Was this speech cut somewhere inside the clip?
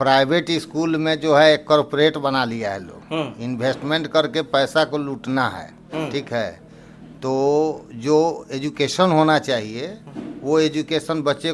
no; 0 cuts

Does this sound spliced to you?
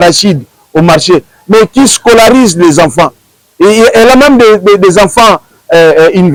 no; 0 cuts

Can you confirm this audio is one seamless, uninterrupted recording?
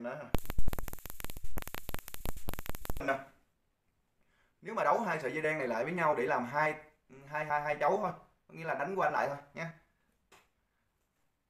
no; 1 cut; at 3.0 s

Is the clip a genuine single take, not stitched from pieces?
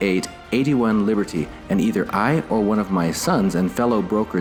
yes; 0 cuts

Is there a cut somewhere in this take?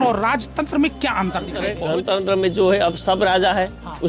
yes; 1 cut; at 1.7 s

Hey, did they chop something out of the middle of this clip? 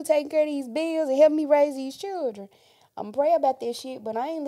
no; 0 cuts

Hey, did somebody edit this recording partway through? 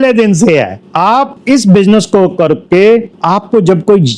no; 0 cuts

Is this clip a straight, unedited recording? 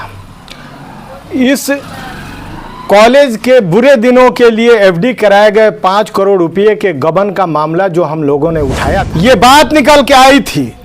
no; 1 cut; at 9.0 s

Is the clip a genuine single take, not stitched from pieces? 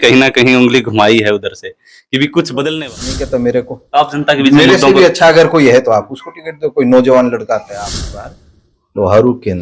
no; 2 cuts; at 3.2 s, 8.3 s

